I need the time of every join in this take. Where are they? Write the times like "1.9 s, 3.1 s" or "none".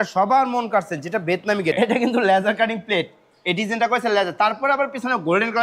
1.7 s